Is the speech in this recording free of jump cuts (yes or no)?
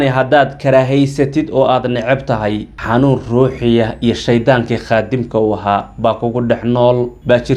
yes